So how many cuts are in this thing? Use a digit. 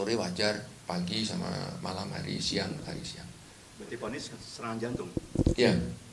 1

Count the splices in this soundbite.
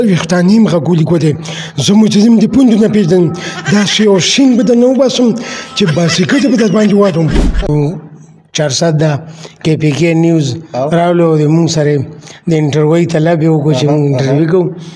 1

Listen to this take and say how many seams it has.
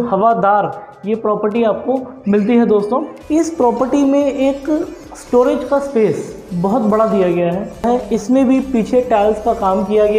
2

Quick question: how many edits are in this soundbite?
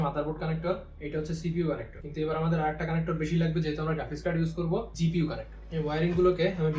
3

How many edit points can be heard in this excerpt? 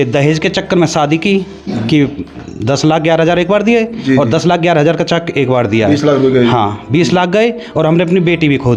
0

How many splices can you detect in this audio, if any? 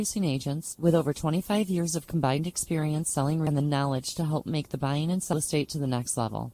2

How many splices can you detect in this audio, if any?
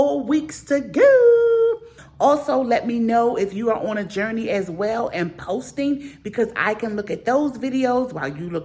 1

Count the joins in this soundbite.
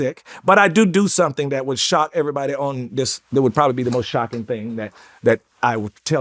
0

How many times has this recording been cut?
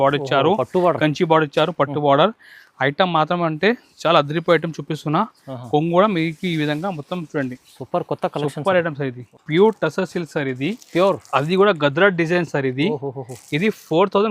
1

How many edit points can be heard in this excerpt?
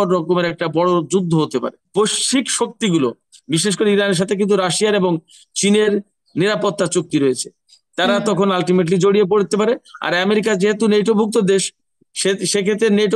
1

